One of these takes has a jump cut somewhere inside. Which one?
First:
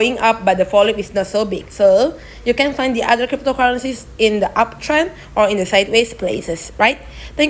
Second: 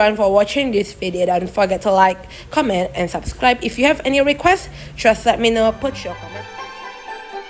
second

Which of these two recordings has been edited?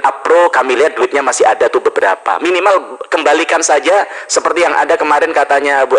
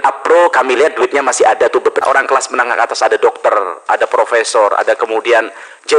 second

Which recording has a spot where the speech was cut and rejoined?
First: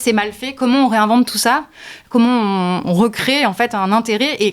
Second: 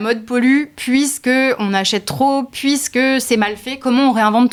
first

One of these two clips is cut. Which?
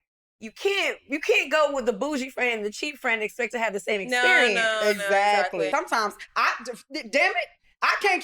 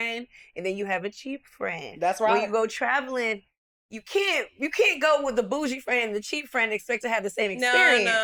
first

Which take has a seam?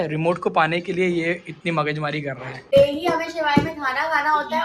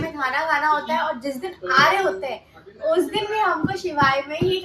first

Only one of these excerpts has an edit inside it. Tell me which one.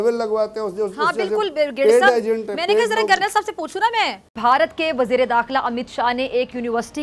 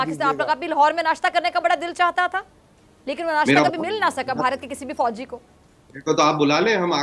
first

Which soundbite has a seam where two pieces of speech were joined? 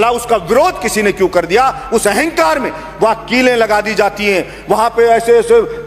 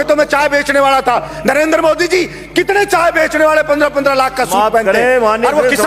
second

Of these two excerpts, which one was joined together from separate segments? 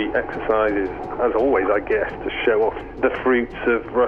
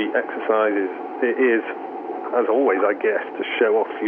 first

